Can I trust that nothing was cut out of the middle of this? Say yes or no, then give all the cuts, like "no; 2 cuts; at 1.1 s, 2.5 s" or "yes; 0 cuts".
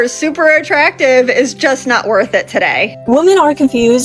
no; 1 cut; at 2.9 s